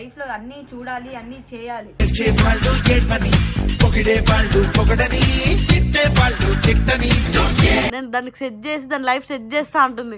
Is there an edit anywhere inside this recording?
yes; 1 cut; at 7.9 s

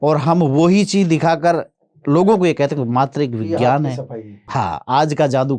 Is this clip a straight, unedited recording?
no; 1 cut; at 4.4 s

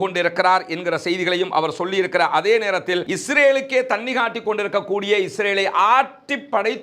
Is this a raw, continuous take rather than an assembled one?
no; 1 cut; at 3.1 s

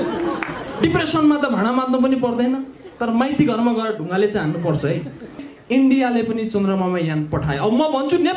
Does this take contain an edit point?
yes; 1 cut; at 5.5 s

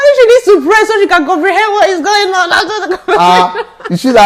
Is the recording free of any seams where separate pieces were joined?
yes; 0 cuts

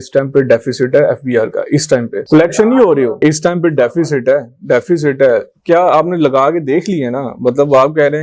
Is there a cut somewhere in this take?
no; 0 cuts

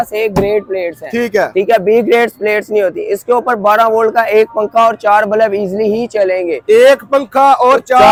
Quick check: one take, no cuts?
yes; 0 cuts

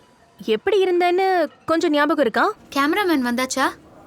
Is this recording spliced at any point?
yes; 1 cut; at 2.6 s

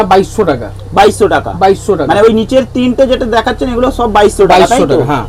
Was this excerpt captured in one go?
yes; 0 cuts

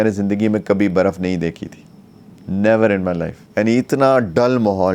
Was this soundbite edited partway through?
yes; 1 cut; at 3.4 s

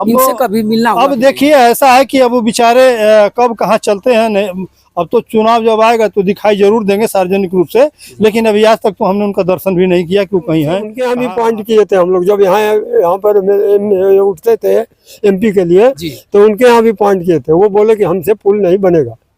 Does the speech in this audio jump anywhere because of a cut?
yes; 1 cut; at 10.9 s

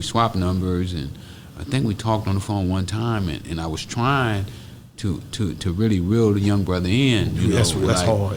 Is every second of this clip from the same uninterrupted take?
yes; 0 cuts

